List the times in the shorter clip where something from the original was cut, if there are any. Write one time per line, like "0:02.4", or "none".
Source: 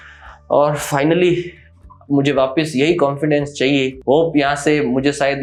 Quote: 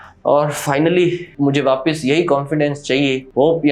0:01.3

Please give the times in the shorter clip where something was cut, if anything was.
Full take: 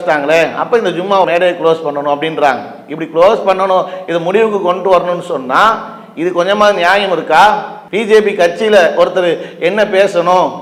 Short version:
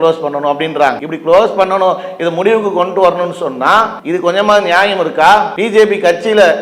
0:01.1
0:04.0
0:05.6

